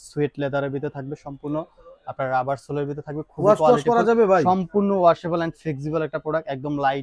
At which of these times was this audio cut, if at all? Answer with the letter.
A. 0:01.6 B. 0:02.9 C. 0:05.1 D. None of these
D